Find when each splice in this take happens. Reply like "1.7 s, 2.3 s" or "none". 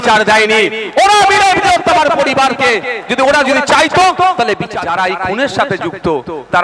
4.8 s